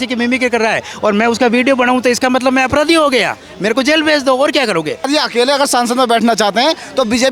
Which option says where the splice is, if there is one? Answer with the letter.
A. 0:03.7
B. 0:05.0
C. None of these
B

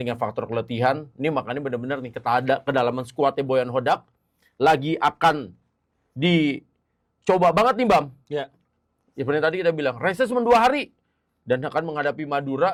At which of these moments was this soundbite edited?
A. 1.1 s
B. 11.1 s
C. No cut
C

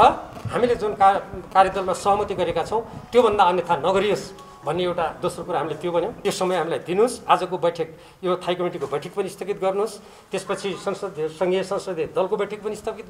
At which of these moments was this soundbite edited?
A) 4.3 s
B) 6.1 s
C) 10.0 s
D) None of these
B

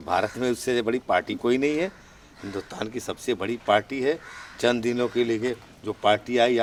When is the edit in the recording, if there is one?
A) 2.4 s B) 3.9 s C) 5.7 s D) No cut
D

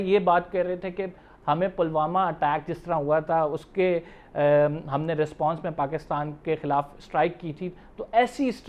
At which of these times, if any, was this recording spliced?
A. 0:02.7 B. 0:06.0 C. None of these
C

